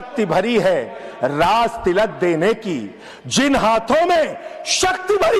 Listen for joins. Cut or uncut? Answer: uncut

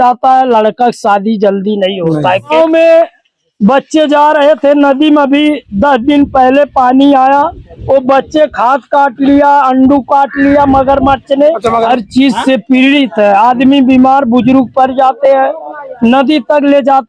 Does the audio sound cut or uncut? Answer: cut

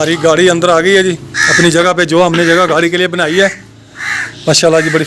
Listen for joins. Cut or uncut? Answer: uncut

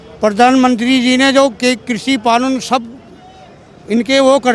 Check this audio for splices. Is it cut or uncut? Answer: uncut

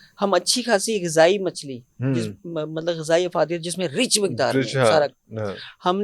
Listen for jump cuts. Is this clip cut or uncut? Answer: uncut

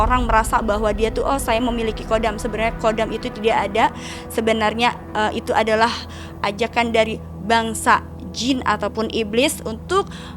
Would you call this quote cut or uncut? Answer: uncut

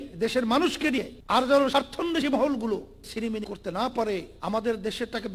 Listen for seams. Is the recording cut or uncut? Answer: cut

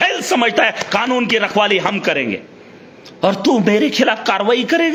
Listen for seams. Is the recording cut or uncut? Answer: uncut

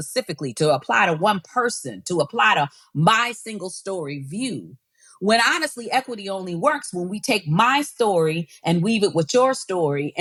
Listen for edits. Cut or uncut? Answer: uncut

